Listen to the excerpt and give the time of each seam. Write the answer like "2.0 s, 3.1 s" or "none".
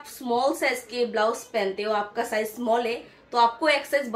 none